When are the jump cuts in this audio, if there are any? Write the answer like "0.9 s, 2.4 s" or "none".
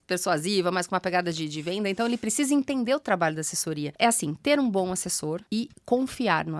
3.9 s, 5.7 s